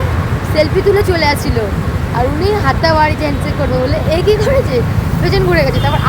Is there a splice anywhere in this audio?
no; 0 cuts

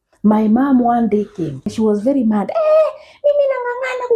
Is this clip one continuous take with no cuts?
no; 1 cut; at 1.7 s

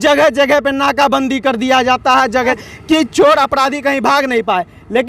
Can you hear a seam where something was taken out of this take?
yes; 1 cut; at 2.6 s

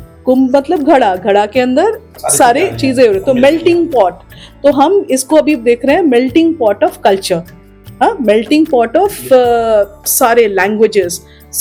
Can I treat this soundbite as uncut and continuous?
yes; 0 cuts

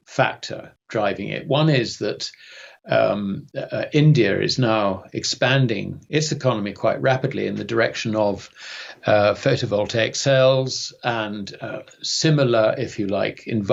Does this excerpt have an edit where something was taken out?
no; 0 cuts

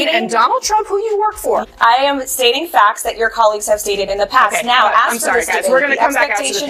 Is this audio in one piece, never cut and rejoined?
yes; 0 cuts

